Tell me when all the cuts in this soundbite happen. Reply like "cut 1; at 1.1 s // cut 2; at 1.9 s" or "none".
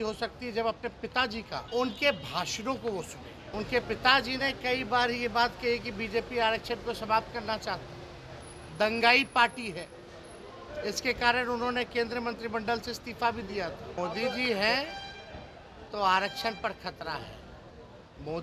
cut 1; at 1.6 s // cut 2; at 3.3 s // cut 3; at 13.9 s